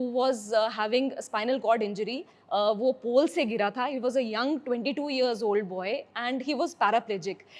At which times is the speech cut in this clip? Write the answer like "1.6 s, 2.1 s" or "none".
none